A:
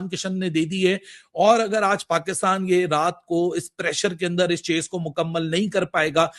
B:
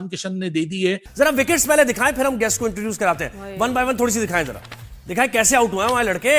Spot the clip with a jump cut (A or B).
B